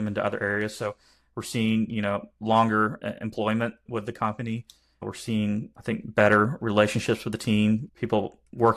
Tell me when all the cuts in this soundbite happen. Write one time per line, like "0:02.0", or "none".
0:03.8
0:05.0
0:05.7
0:07.9